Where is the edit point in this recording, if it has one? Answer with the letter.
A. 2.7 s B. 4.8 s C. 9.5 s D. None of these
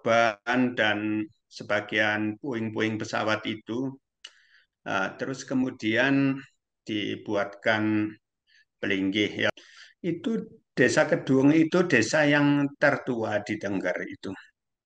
C